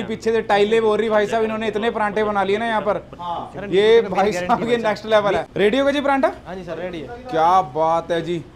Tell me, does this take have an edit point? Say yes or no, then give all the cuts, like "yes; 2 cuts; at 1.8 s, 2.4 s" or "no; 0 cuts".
no; 0 cuts